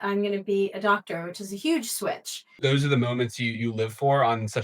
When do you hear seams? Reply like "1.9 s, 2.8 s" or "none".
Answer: 2.6 s